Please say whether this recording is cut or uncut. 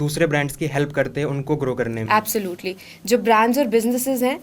uncut